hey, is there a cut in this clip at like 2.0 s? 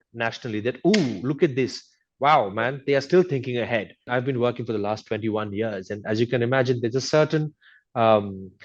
no; 1 cut; at 4.1 s

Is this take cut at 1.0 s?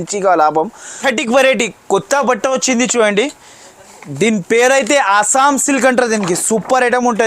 yes; 1 cut; at 1.0 s

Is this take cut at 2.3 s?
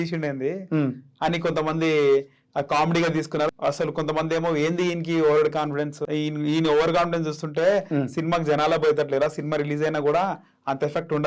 no; 2 cuts; at 3.5 s, 6.0 s

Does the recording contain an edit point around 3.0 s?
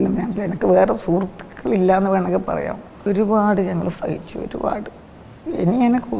yes; 1 cut; at 3.0 s

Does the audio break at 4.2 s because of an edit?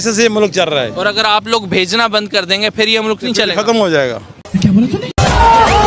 no; 0 cuts

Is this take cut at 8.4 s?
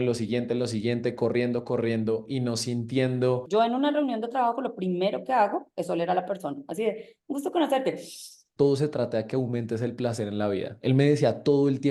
yes; 2 cuts; at 3.4 s, 8.4 s

